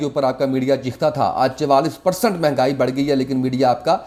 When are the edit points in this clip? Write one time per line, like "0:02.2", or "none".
none